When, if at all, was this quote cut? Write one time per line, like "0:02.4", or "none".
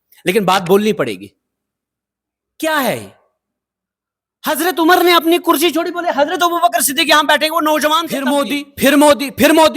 0:08.1